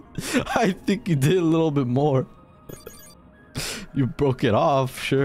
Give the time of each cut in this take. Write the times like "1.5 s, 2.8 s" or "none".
none